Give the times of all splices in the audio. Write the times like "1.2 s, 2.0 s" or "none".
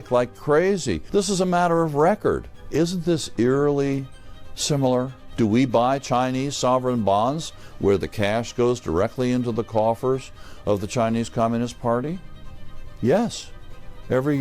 1.0 s, 2.5 s, 5.2 s